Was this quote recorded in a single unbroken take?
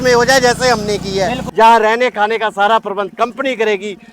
no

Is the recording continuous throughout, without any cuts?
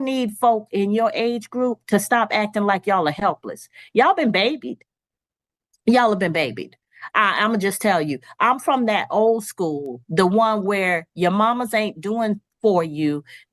yes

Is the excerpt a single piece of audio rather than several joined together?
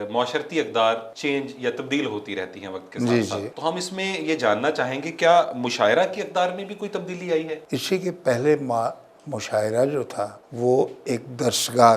no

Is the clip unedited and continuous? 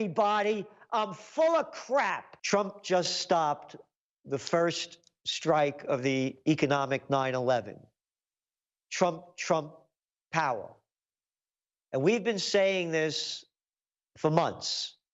no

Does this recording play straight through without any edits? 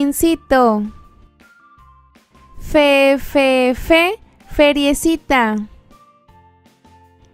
yes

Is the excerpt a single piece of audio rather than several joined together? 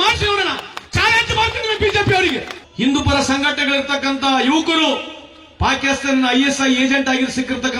no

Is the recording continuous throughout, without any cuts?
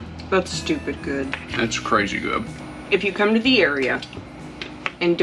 no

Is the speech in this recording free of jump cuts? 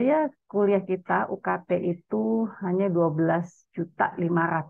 yes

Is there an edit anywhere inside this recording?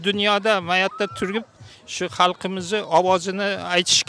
no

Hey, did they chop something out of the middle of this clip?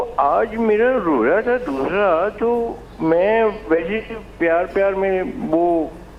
no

